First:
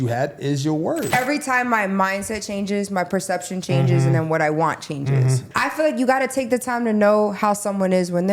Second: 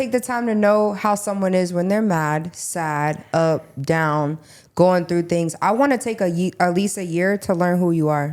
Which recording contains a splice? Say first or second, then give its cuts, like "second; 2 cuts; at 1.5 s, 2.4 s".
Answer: first; 2 cuts; at 1.1 s, 5.5 s